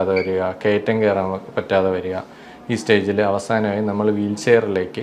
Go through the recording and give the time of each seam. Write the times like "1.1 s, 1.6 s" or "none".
none